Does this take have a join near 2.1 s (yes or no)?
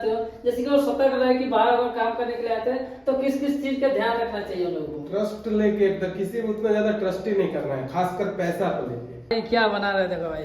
no